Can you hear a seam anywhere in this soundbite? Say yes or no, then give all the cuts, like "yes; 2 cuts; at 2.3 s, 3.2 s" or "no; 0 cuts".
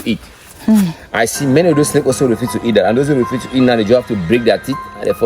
no; 0 cuts